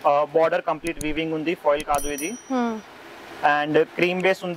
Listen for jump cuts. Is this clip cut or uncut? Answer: uncut